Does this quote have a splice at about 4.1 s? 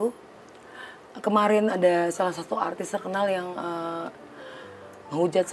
yes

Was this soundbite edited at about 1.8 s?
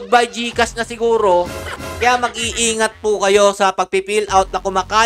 yes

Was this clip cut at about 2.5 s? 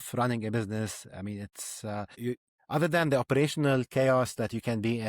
yes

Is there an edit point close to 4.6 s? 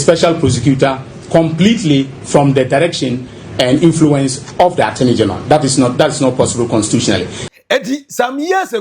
no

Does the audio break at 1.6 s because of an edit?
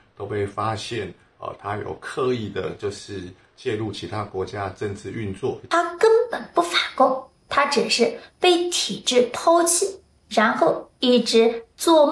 no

